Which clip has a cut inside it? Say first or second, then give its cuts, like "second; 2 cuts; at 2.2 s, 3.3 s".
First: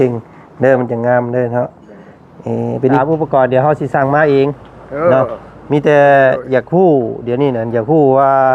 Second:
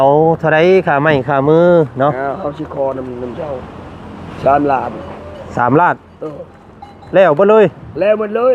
first; 1 cut; at 3.0 s